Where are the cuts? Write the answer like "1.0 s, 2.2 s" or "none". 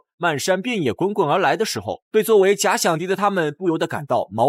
none